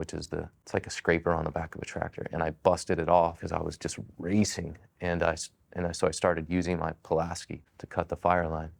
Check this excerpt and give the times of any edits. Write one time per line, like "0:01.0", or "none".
none

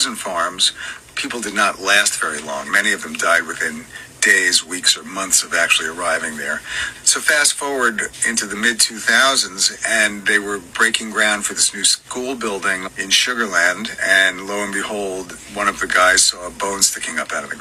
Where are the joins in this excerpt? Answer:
none

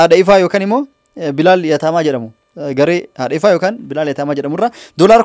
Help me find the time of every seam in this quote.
none

